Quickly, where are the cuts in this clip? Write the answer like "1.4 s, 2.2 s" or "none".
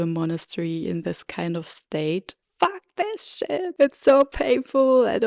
2.4 s, 3.7 s